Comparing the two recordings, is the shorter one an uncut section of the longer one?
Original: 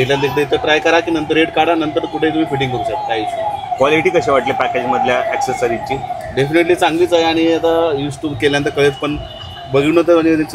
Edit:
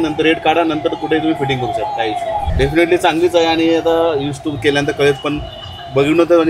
no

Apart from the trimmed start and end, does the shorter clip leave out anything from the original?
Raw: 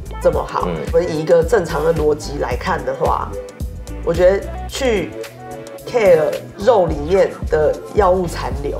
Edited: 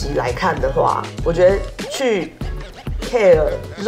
yes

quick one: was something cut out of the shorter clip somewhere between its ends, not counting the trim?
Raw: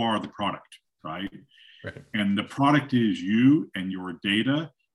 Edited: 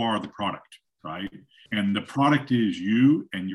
yes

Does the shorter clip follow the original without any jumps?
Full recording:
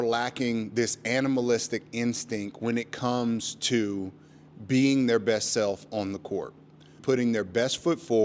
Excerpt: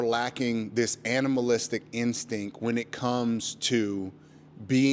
yes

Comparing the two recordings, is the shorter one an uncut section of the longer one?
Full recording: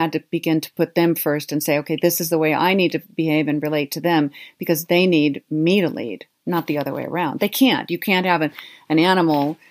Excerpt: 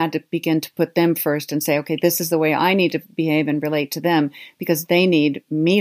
yes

